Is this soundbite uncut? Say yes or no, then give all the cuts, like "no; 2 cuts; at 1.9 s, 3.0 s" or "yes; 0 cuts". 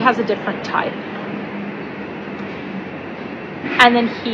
yes; 0 cuts